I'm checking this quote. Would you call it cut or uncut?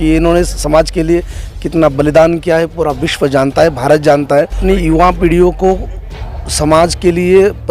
cut